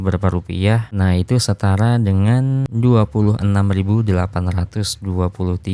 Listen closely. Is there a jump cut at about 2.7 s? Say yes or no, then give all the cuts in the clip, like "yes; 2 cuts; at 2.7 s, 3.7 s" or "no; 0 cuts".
yes; 2 cuts; at 0.9 s, 2.7 s